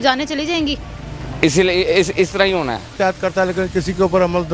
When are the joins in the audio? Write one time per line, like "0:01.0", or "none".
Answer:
0:02.9